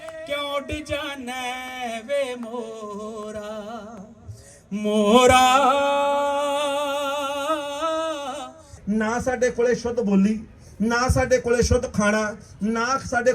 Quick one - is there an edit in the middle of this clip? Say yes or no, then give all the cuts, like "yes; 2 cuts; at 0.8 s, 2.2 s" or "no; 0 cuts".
yes; 1 cut; at 8.7 s